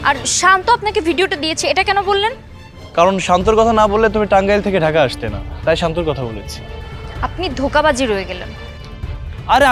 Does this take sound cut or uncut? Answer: uncut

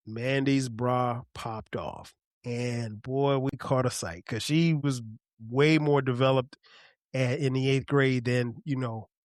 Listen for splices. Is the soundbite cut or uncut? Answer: cut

